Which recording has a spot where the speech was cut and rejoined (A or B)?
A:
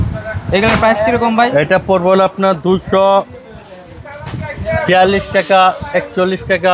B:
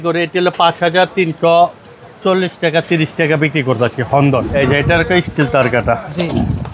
B